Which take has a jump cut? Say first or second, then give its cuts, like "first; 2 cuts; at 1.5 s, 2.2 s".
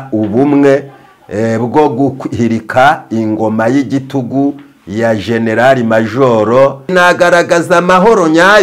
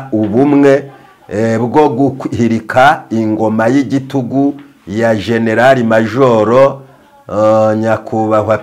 first; 1 cut; at 6.9 s